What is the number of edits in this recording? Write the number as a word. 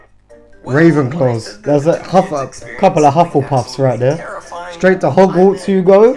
zero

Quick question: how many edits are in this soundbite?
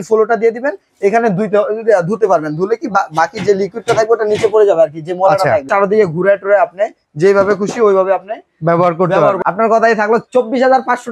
two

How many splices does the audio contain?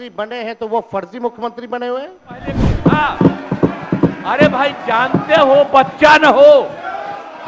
one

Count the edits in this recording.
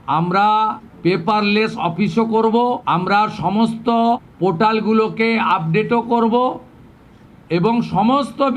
three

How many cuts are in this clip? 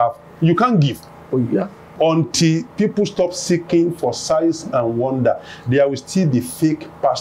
one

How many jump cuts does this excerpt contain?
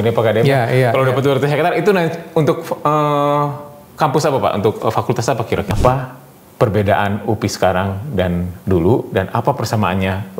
one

